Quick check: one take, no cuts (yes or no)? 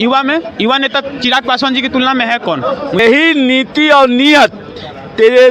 no